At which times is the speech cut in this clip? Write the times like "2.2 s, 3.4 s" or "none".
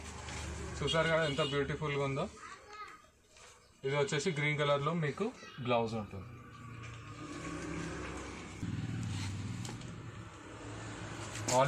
8.6 s